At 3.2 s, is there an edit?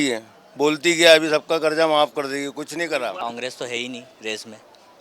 yes; 1 cut; at 3.2 s

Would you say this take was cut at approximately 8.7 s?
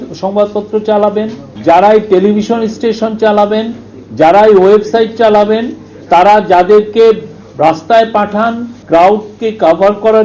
yes; 2 cuts; at 1.4 s, 8.7 s

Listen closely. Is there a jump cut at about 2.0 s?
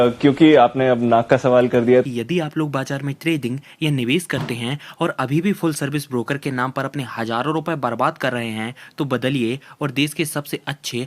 yes; 1 cut; at 2.0 s

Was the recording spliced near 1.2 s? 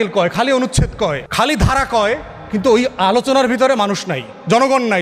yes; 1 cut; at 1.2 s

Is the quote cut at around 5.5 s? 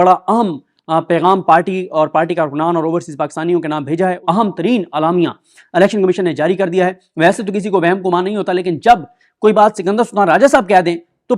no; 2 cuts; at 4.2 s, 7.0 s

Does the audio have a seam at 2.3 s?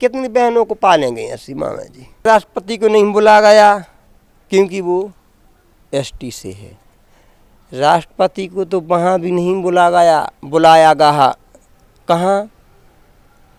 yes; 1 cut; at 2.3 s

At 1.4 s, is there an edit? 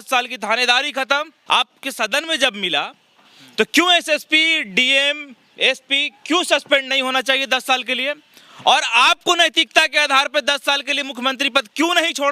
yes; 1 cut; at 1.4 s

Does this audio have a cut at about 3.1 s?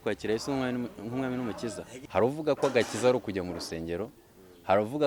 no; 1 cut; at 1.9 s

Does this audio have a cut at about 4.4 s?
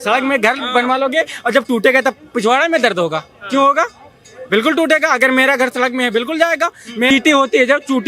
no; 1 cut; at 7.1 s

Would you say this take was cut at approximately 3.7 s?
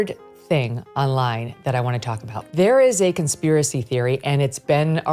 no; 1 cut; at 2.4 s

